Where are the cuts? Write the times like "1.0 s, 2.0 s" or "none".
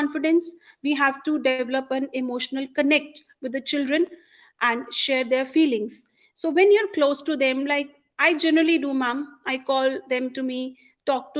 none